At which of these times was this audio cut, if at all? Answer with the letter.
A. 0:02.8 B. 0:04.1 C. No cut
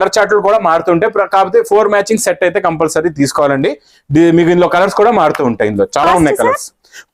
C